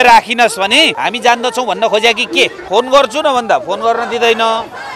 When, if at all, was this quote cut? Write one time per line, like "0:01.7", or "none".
0:01.0
0:02.6